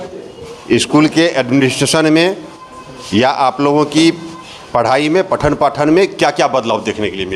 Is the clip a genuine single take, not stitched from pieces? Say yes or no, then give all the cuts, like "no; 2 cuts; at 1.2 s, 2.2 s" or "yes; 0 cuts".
yes; 0 cuts